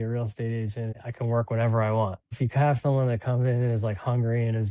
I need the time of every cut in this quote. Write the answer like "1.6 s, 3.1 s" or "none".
1.0 s, 2.4 s